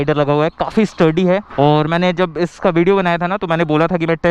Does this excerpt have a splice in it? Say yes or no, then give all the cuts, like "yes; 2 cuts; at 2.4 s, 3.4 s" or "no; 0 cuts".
no; 0 cuts